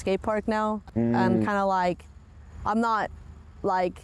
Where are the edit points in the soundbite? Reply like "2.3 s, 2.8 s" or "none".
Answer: none